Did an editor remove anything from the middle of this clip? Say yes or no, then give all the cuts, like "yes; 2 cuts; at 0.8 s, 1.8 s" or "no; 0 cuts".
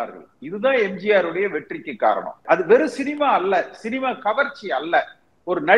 yes; 1 cut; at 2.4 s